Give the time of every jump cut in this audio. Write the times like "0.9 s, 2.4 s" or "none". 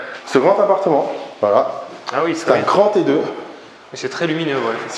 none